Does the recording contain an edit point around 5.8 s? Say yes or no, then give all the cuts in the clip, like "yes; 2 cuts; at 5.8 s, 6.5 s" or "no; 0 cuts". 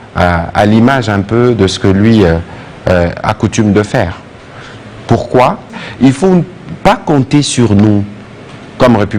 yes; 1 cut; at 5.8 s